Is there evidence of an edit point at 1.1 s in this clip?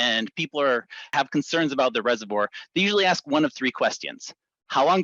yes; 1 cut; at 1.1 s

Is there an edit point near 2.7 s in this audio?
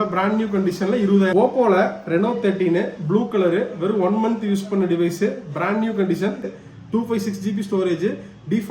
no; 2 cuts; at 1.3 s, 6.5 s

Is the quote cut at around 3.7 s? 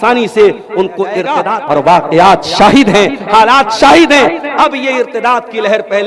no; 1 cut; at 1.5 s

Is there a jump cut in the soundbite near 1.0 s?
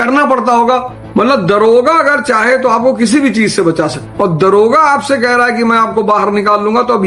yes; 2 cuts; at 1.0 s, 4.1 s

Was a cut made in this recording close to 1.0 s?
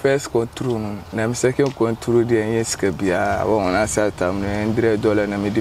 yes; 1 cut; at 1.0 s

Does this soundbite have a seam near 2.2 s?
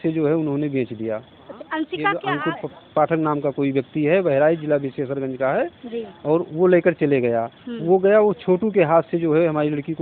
yes; 1 cut; at 2.2 s

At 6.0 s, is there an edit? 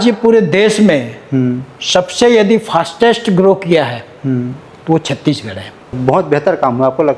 yes; 1 cut; at 6.0 s

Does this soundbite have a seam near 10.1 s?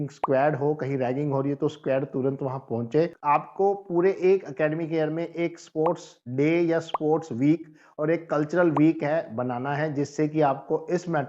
no; 1 cut; at 3.2 s

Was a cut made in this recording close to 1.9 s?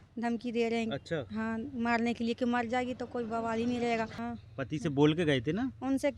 no; 1 cut; at 4.2 s

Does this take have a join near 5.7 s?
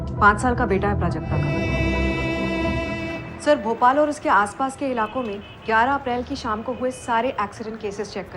no; 1 cut; at 1.5 s

